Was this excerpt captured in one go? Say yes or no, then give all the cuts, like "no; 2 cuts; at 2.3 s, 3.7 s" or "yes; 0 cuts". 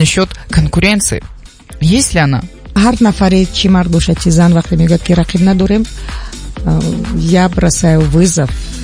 no; 1 cut; at 2.7 s